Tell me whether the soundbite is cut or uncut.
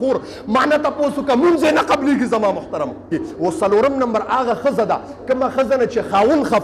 cut